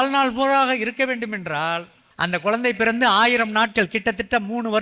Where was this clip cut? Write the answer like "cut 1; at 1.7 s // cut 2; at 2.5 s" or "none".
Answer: cut 1; at 2.0 s